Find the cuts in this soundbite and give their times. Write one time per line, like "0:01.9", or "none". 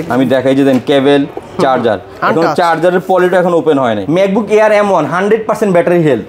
0:04.0